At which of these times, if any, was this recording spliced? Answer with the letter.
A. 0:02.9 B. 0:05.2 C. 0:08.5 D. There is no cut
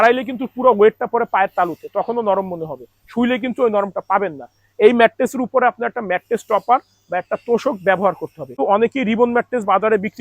C